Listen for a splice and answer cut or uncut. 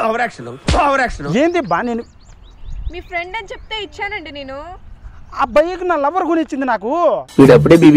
uncut